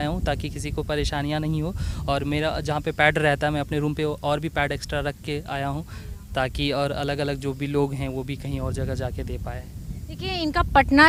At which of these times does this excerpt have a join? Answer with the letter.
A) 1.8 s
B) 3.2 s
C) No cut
C